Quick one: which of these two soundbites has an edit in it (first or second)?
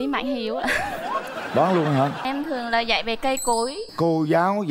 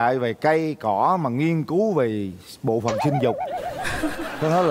first